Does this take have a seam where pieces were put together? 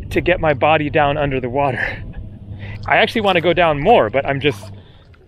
yes; 1 cut; at 2.7 s

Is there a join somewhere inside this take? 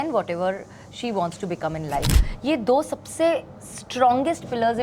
yes; 1 cut; at 2.1 s

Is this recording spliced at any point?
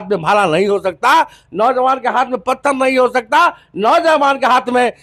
no; 0 cuts

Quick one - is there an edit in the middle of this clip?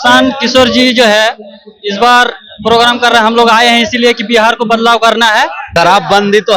yes; 1 cut; at 5.6 s

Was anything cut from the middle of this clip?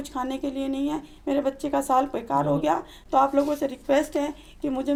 no; 0 cuts

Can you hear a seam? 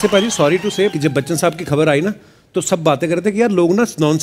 yes; 1 cut; at 0.9 s

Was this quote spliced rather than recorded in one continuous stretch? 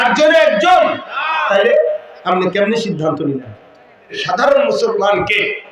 yes; 1 cut; at 4.2 s

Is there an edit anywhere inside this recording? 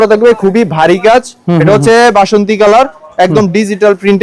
no; 0 cuts

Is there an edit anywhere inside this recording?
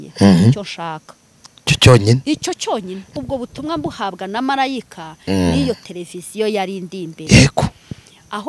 yes; 1 cut; at 3.1 s

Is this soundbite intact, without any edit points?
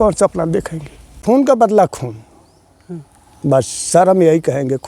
no; 1 cut; at 1.1 s

